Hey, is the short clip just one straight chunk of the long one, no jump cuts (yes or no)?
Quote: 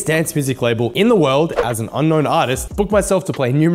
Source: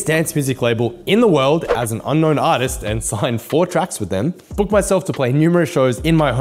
no